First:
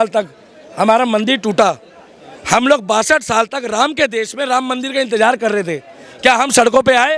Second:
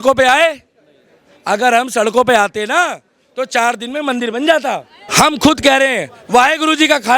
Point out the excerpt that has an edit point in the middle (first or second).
second